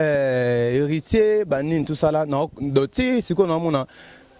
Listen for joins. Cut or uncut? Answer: uncut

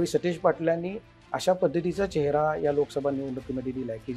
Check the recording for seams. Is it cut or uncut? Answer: uncut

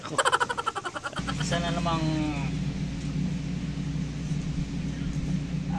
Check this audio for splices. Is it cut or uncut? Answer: cut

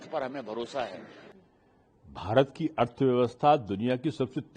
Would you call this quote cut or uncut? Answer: cut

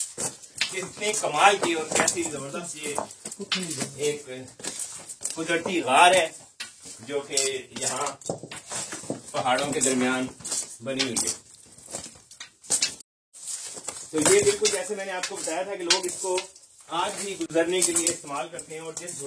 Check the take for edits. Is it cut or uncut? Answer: uncut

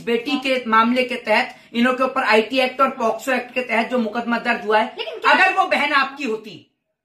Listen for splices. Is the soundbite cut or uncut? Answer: uncut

